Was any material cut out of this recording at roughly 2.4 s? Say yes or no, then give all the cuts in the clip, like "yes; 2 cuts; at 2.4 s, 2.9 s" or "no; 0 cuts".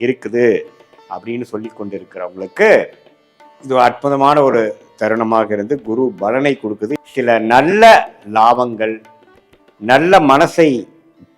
no; 1 cut; at 6.9 s